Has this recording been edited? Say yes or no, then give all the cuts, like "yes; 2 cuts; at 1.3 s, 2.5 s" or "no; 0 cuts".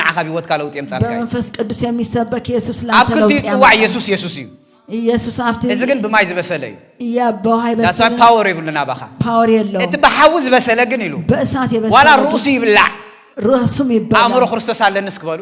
no; 0 cuts